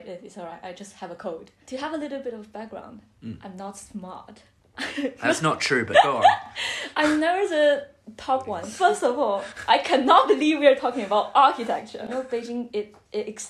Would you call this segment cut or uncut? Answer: cut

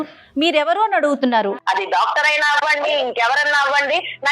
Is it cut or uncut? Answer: cut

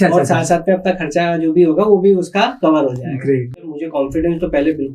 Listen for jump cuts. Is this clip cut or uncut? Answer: cut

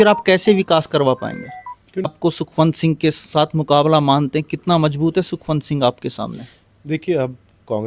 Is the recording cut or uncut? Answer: cut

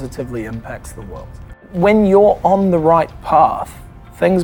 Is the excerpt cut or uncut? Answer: cut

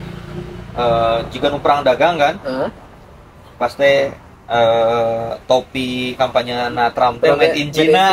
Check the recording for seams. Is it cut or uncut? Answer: uncut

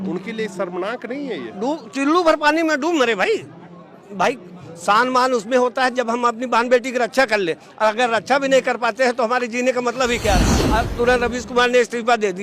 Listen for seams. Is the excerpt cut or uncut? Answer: cut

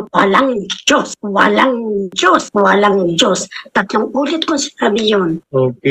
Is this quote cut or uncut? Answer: uncut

